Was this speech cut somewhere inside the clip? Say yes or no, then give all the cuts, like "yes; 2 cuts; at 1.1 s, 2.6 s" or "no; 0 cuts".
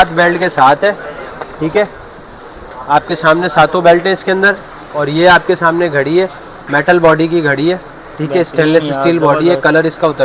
no; 0 cuts